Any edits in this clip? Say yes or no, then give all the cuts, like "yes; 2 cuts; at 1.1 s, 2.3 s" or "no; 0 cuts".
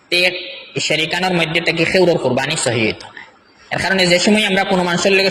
no; 0 cuts